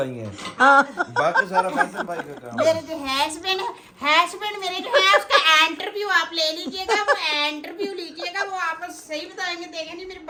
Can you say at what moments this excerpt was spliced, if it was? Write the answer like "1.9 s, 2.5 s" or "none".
none